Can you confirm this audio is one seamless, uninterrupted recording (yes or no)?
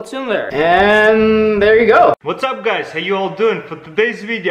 no